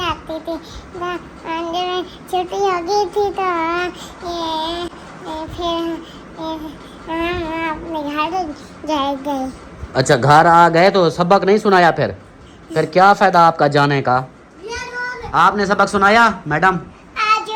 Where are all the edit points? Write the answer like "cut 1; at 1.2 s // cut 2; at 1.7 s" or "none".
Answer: none